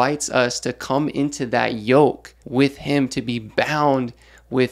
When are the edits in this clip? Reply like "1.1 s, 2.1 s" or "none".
2.3 s